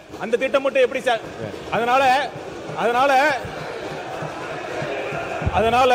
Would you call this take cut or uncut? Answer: uncut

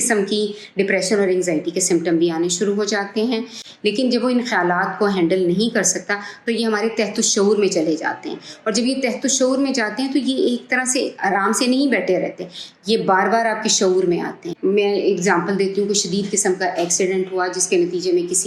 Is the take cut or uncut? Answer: cut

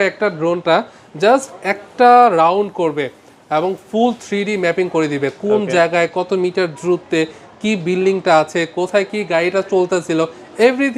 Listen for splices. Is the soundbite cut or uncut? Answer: uncut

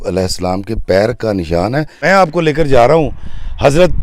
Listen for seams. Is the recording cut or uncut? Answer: cut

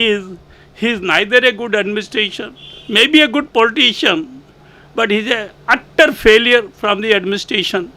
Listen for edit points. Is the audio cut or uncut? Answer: uncut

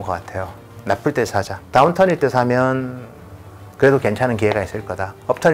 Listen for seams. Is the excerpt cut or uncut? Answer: cut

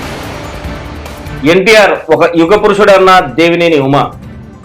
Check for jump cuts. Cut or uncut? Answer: cut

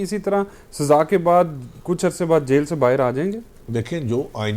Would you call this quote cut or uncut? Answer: uncut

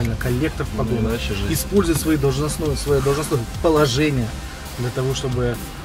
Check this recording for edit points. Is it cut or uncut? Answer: uncut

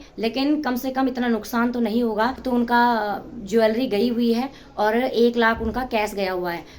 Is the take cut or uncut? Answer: cut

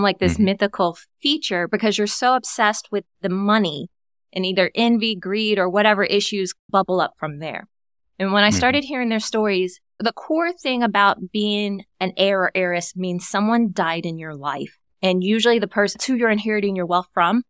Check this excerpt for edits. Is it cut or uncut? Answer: cut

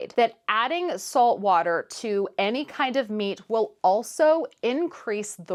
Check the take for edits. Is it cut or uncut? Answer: uncut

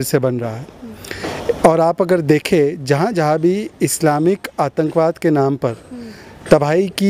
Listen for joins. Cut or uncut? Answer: uncut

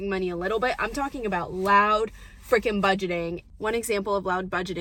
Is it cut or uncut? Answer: uncut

